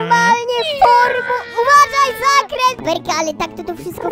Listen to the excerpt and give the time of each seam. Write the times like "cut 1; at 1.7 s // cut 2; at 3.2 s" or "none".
cut 1; at 2.8 s